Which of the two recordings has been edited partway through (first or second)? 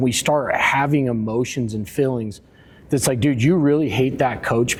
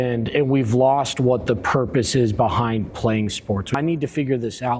second